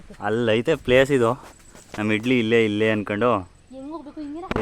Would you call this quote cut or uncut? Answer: uncut